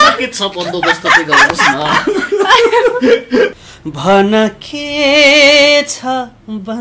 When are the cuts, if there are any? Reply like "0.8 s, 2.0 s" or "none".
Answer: 3.6 s